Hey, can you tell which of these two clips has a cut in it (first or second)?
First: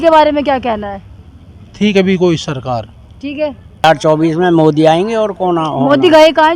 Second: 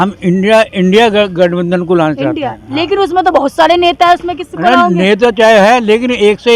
first